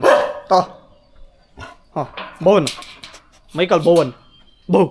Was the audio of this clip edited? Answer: no; 0 cuts

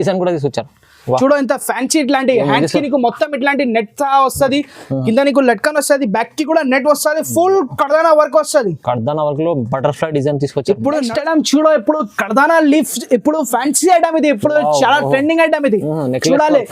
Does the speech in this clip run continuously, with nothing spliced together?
no; 1 cut; at 11.1 s

